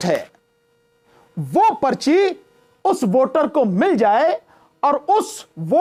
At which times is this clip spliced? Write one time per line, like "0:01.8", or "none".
none